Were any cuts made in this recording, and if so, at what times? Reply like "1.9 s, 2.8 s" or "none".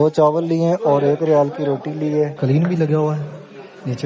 2.3 s